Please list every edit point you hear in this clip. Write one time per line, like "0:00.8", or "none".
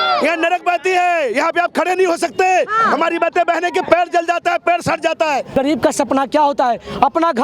0:05.5